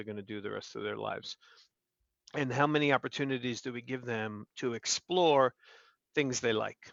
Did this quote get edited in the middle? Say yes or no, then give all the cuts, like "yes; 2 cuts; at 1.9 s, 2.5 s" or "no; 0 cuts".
no; 0 cuts